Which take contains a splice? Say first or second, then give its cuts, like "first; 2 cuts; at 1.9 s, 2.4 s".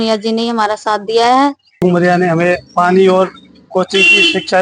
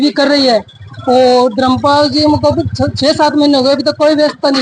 first; 1 cut; at 1.8 s